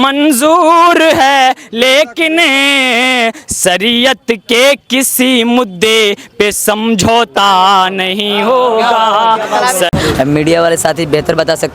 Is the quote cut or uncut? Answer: cut